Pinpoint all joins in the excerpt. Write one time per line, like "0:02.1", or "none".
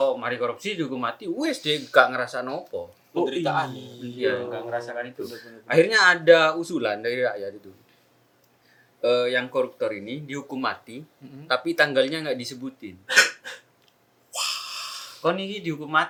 none

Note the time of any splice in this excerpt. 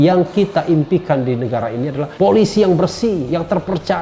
0:02.1

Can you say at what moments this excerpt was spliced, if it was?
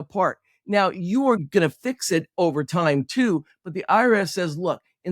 0:01.4

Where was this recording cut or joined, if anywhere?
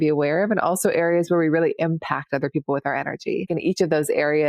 0:03.5

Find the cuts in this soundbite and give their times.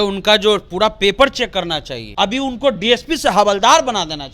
0:02.0

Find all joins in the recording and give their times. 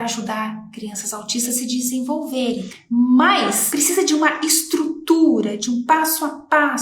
0:03.6

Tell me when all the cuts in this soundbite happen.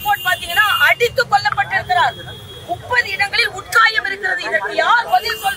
none

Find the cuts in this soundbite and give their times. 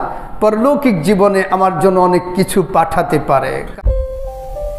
0:03.6

